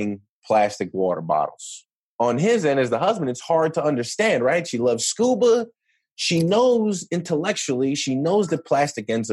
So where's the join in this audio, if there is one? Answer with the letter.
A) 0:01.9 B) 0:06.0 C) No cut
A